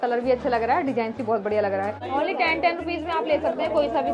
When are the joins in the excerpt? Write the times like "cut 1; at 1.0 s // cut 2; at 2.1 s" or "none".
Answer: cut 1; at 2.0 s